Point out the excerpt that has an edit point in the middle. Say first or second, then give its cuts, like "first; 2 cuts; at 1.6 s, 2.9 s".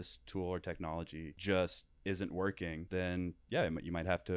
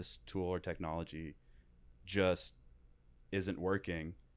first; 3 cuts; at 1.3 s, 1.9 s, 2.8 s